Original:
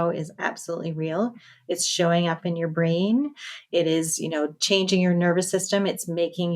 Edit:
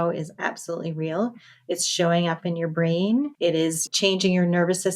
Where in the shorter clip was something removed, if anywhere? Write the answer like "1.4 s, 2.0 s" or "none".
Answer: 3.7 s